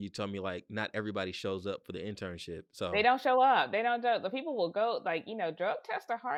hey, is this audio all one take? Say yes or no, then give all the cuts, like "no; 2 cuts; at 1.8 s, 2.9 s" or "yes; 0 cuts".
yes; 0 cuts